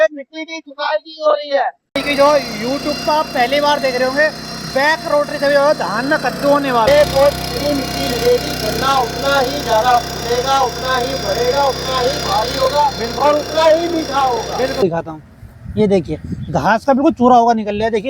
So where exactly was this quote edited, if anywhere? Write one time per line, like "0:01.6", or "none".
0:02.0
0:06.9
0:14.8